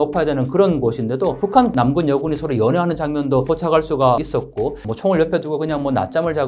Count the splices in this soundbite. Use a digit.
2